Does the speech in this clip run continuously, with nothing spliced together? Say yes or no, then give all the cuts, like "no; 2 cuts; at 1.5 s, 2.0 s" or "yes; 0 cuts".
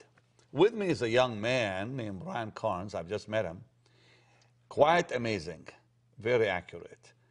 yes; 0 cuts